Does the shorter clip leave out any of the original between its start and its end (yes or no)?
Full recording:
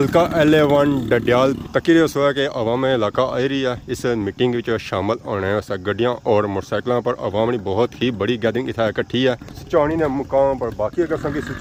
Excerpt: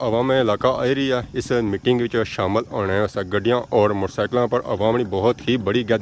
no